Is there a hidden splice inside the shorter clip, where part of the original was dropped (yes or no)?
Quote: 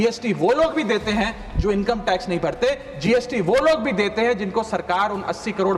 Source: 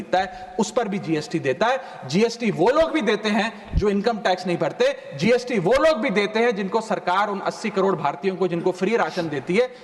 no